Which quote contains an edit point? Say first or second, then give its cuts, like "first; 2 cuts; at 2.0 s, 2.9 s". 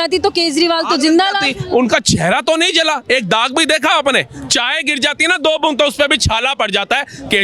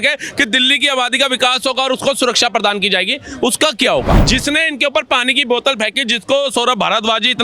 second; 1 cut; at 4.2 s